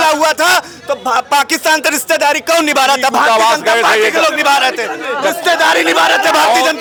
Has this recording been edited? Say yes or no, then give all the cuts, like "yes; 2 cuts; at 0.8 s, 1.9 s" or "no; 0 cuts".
no; 0 cuts